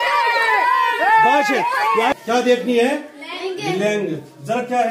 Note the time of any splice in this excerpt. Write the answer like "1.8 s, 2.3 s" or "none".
2.1 s